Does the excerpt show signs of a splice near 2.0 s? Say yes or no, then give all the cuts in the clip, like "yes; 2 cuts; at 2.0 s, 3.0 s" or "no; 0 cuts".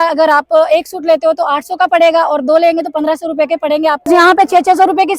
no; 1 cut; at 4.1 s